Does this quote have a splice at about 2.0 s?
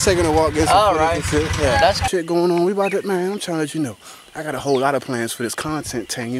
yes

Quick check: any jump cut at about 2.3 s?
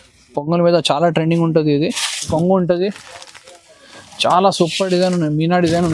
yes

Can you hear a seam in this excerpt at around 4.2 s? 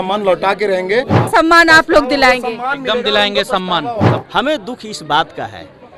yes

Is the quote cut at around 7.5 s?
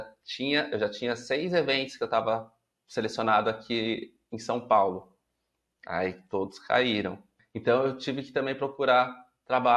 yes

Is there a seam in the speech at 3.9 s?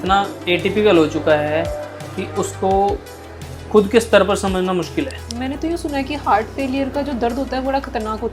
no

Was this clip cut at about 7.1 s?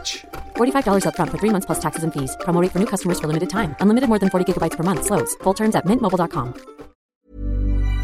yes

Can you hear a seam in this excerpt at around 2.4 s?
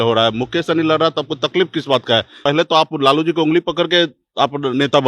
yes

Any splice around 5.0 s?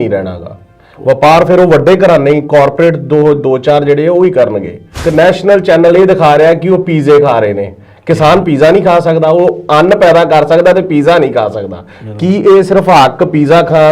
yes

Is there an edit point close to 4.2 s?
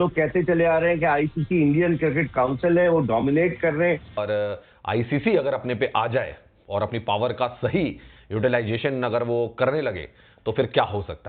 yes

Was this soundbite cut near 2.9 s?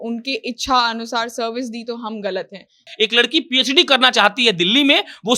yes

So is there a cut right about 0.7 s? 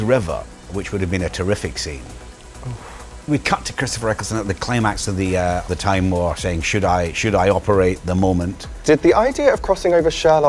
yes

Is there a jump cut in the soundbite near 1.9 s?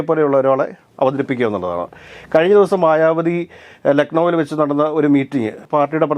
no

